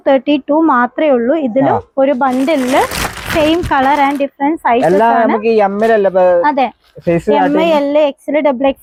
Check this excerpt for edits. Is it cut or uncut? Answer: uncut